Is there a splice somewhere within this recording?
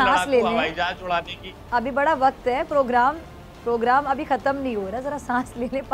no; 0 cuts

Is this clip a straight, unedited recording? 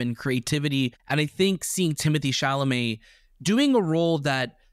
no; 1 cut; at 1.0 s

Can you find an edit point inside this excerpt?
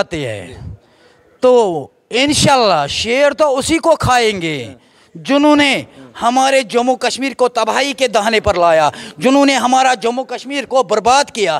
no; 0 cuts

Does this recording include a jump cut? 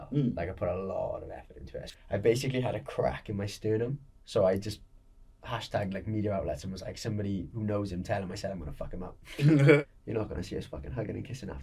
yes; 3 cuts; at 1.8 s, 4.2 s, 9.8 s

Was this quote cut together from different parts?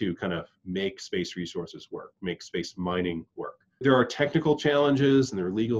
yes; 1 cut; at 3.8 s

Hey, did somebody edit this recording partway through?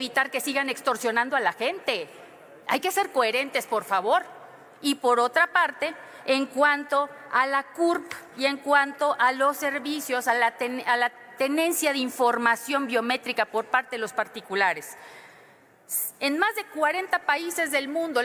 no; 0 cuts

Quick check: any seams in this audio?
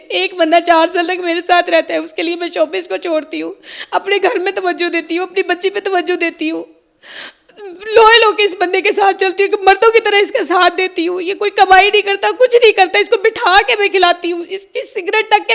no; 0 cuts

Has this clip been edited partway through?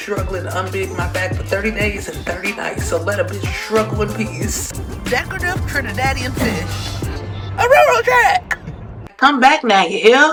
no; 0 cuts

